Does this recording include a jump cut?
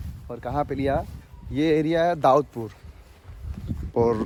no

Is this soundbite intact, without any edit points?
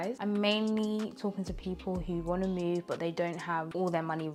yes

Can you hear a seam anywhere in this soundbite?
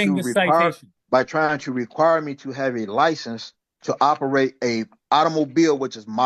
yes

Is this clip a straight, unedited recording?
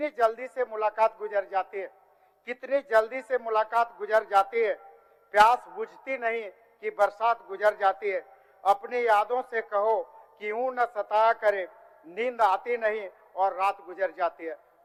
yes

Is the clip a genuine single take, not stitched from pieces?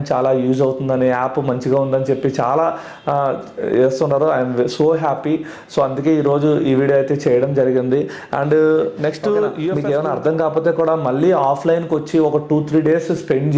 no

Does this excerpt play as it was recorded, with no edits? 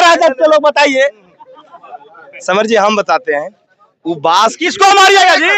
yes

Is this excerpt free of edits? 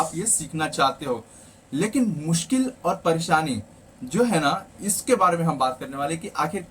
yes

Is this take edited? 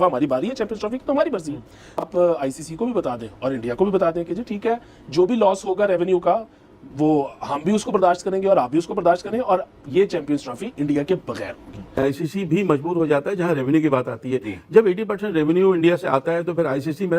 yes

